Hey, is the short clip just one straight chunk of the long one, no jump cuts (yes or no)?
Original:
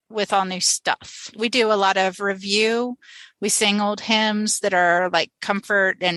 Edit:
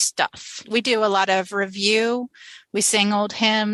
yes